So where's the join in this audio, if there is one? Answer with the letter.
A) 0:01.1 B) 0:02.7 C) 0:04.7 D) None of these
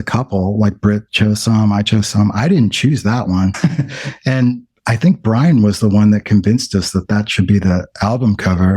A